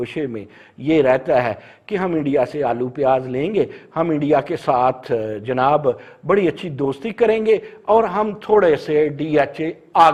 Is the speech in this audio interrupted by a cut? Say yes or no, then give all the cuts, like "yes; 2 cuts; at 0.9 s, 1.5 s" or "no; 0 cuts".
no; 0 cuts